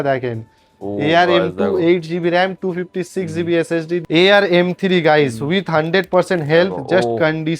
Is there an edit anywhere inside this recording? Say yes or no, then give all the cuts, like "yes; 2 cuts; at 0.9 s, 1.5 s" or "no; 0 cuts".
yes; 1 cut; at 4.0 s